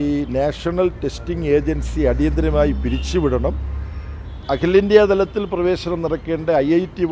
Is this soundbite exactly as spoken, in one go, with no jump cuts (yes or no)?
yes